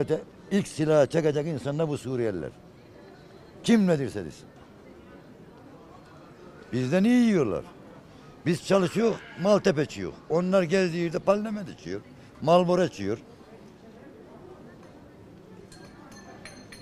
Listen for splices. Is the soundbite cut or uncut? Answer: uncut